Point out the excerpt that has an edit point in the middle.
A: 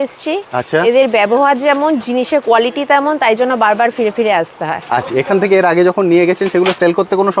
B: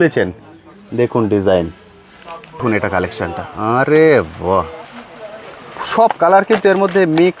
B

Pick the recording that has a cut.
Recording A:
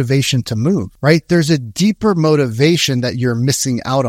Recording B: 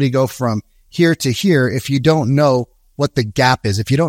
A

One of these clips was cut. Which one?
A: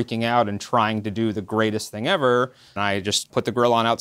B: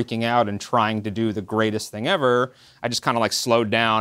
A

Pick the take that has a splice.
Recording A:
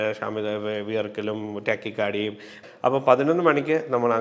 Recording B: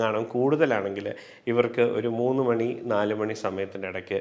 A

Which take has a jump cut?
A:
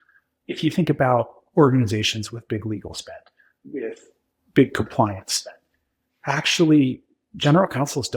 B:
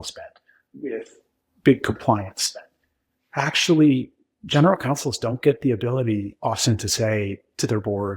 B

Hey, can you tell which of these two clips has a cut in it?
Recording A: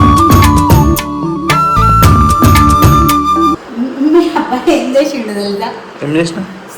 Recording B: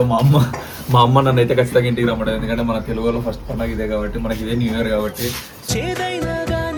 A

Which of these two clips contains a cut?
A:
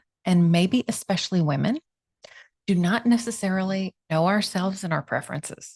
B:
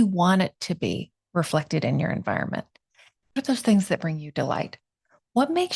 B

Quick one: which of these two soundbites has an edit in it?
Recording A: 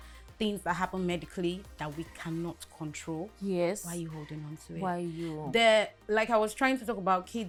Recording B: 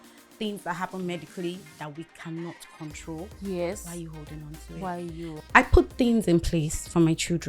B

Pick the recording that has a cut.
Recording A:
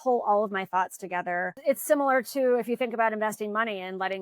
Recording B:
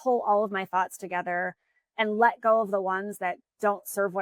A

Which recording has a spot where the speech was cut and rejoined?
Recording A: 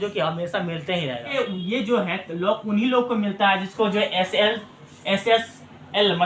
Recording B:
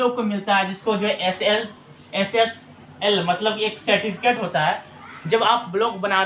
A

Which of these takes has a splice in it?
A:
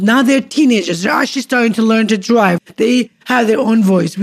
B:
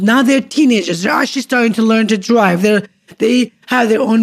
A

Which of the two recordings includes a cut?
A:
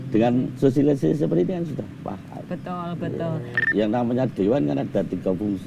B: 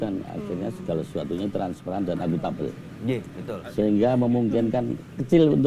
A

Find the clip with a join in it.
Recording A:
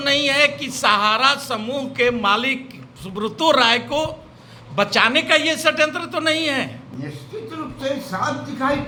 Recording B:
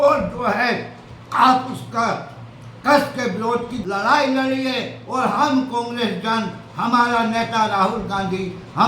B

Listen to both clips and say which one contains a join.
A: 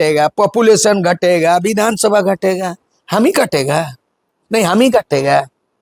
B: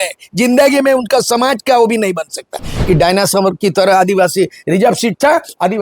B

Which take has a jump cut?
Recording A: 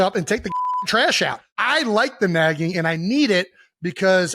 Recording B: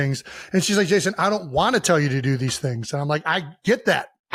A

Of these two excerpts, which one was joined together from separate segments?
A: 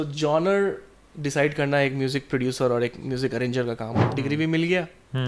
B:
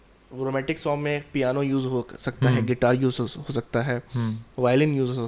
A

